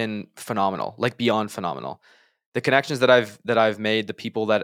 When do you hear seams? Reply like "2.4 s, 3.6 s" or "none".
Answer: none